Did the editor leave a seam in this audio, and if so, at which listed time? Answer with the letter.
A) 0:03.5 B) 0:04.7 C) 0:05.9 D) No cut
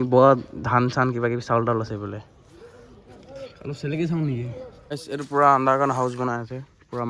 B